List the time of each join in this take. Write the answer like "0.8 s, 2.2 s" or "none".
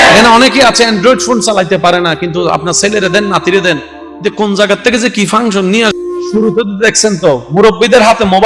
6.0 s